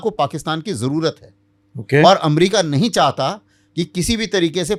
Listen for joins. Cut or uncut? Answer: uncut